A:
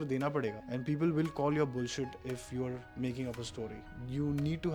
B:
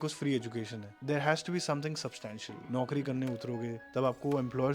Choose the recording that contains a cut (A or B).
B